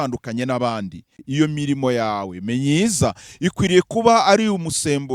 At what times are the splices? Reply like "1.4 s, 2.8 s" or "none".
1.2 s

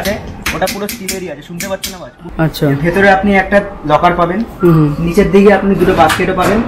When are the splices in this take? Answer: 2.2 s

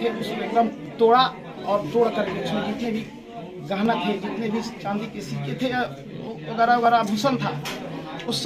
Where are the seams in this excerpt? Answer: none

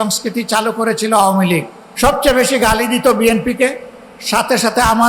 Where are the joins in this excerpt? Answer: 1.8 s

